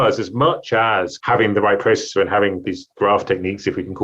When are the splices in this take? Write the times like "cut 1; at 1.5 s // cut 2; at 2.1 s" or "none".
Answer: cut 1; at 1.1 s // cut 2; at 2.6 s